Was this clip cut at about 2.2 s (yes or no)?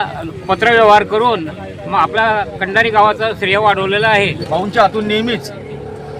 no